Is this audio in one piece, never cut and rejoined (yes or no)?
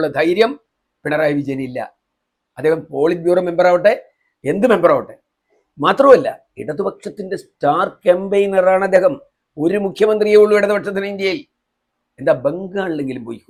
yes